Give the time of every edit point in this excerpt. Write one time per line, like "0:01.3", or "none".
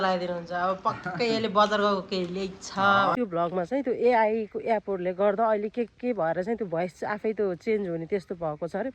0:03.2